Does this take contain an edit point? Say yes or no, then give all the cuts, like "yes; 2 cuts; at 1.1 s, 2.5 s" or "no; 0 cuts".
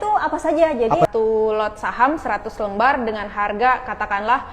yes; 1 cut; at 1.1 s